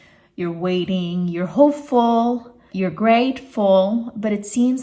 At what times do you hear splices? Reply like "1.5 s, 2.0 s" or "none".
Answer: 2.7 s